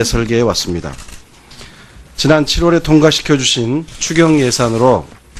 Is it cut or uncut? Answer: uncut